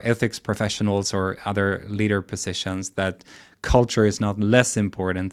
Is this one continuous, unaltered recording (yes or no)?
no